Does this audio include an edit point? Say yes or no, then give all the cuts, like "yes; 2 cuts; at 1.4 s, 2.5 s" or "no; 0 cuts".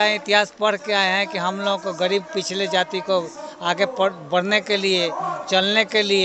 no; 0 cuts